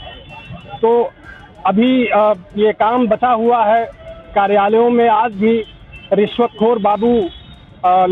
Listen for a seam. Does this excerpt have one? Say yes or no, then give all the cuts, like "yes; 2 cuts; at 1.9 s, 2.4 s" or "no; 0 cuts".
no; 0 cuts